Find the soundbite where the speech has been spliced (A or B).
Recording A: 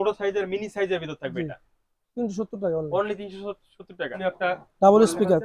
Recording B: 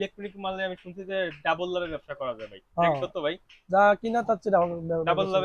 A